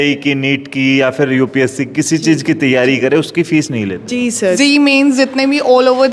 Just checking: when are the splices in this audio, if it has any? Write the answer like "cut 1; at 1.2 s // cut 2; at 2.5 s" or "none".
cut 1; at 4.6 s